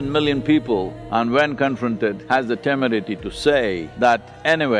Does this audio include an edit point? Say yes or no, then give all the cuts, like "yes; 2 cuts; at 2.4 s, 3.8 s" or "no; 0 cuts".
yes; 3 cuts; at 1.0 s, 2.2 s, 3.9 s